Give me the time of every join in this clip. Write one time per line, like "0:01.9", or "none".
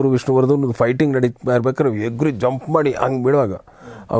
none